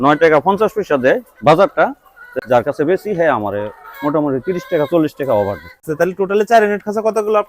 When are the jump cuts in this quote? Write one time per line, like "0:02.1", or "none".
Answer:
0:02.2
0:05.9